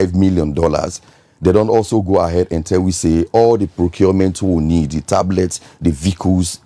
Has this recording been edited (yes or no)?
no